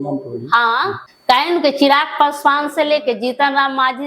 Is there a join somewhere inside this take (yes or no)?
yes